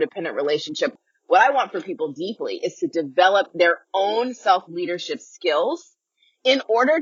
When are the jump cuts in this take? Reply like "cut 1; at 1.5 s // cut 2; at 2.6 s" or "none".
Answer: cut 1; at 0.9 s